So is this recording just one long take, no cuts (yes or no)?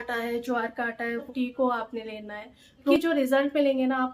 no